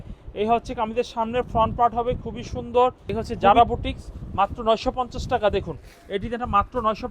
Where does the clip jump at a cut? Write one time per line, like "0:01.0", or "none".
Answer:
0:03.0